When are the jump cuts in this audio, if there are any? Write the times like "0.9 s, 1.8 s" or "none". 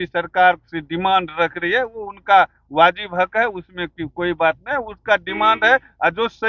none

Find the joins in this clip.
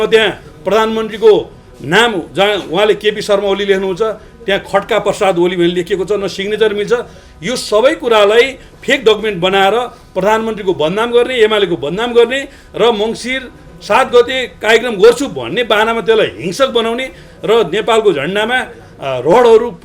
none

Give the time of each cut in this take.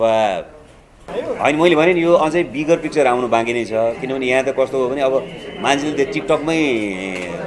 1.1 s

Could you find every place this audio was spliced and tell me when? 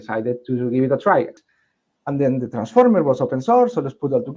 1.4 s

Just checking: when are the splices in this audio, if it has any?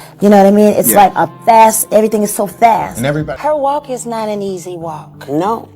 3.3 s

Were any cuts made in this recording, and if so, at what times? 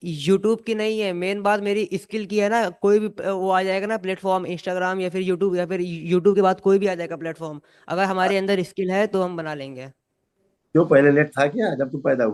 none

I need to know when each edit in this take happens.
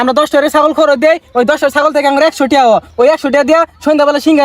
none

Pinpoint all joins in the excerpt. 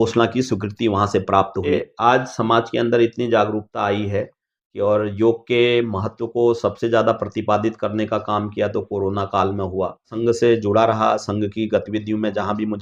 1.7 s, 10.1 s

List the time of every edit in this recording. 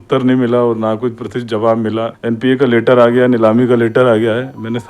2.1 s

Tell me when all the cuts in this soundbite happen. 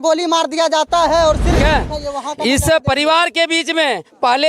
1.6 s

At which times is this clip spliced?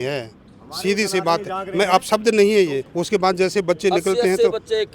2.9 s

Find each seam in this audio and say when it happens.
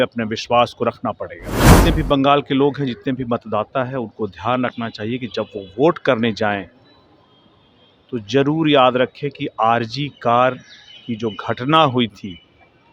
1.8 s

